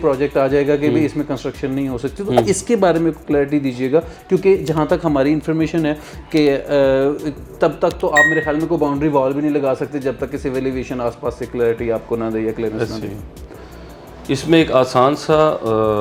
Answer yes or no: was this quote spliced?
no